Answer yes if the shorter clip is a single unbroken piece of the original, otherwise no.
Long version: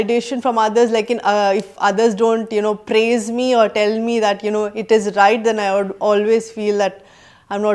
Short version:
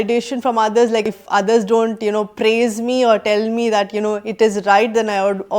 no